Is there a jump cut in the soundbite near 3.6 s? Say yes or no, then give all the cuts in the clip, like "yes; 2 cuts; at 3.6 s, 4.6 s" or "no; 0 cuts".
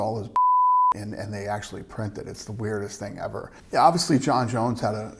yes; 1 cut; at 3.6 s